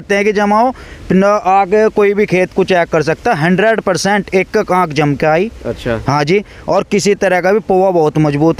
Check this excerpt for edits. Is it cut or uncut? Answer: uncut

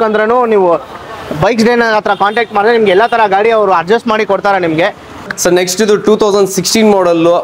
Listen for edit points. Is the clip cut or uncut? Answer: cut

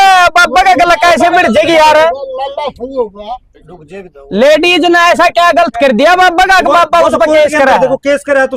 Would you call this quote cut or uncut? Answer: uncut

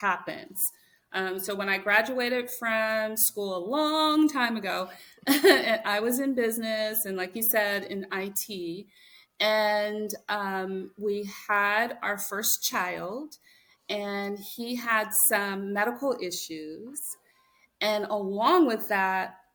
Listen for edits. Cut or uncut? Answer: uncut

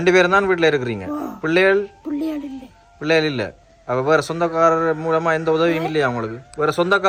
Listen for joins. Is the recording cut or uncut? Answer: uncut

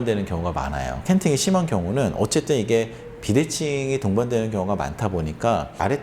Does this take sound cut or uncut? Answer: cut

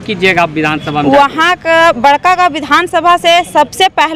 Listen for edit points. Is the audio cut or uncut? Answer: uncut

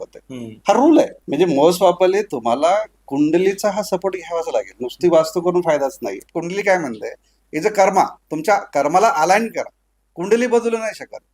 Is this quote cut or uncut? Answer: cut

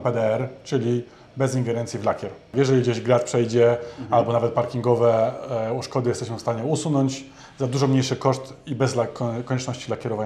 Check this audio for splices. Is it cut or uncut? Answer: cut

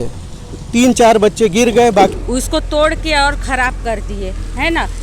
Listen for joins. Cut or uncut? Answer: cut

